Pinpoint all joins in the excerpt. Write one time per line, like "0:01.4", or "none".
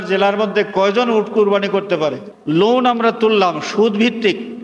0:02.3